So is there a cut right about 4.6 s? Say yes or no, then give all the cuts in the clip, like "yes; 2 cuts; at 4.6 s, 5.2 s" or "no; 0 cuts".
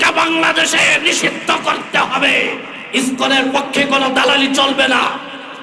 no; 1 cut; at 2.8 s